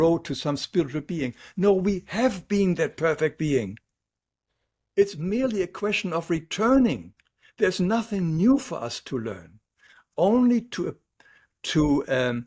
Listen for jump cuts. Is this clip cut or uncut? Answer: uncut